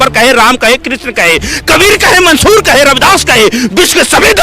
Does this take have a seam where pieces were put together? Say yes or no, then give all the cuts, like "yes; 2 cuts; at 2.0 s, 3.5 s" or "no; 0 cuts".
no; 0 cuts